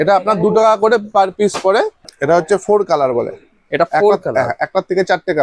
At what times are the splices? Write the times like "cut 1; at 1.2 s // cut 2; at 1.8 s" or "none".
cut 1; at 2.0 s